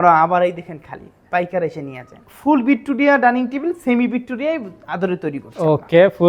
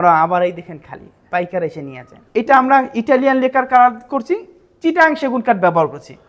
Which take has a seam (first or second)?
second